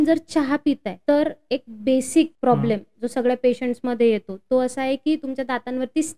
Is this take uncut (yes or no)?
no